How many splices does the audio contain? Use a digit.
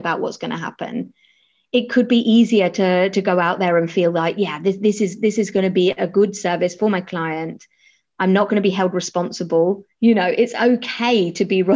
1